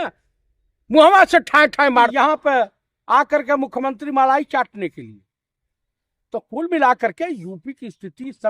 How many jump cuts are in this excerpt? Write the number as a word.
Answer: one